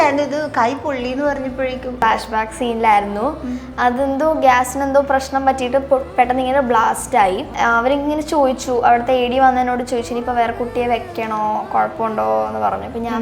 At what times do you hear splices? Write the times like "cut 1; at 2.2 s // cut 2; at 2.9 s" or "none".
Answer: cut 1; at 2.0 s // cut 2; at 7.5 s